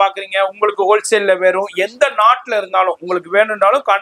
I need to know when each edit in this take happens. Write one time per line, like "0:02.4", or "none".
none